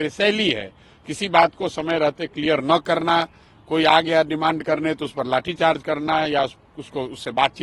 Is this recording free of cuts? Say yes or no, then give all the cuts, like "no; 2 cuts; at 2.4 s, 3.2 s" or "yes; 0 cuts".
yes; 0 cuts